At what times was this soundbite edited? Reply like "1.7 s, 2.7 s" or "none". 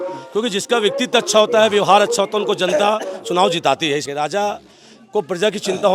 4.0 s